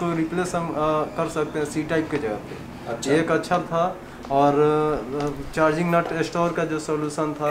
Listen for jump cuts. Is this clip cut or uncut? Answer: uncut